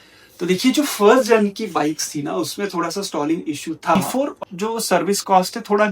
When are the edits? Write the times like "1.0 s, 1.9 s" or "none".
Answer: 4.0 s